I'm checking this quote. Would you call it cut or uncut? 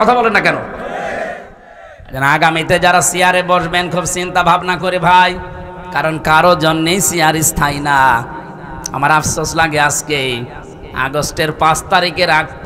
cut